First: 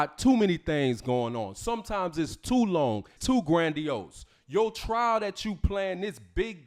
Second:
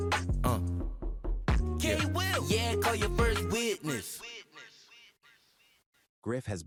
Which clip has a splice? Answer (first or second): first